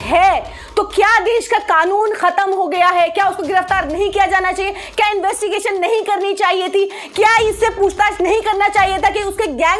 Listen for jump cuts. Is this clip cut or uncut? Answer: uncut